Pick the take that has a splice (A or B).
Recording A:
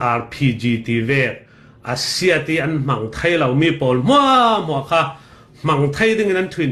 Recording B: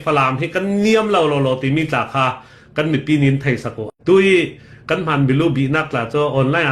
B